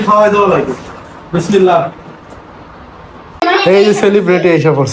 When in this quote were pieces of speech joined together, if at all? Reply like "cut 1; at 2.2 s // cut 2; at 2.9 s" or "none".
cut 1; at 3.4 s